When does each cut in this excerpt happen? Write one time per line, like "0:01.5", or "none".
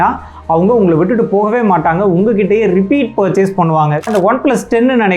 0:04.1